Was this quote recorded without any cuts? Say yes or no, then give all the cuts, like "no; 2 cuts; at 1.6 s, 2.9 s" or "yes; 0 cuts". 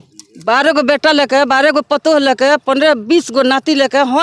yes; 0 cuts